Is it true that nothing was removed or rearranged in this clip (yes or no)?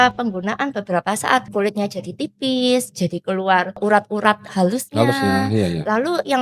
no